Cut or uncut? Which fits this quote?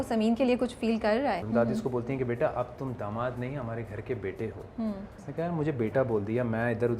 cut